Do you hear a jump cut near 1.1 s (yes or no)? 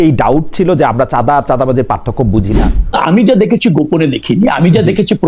no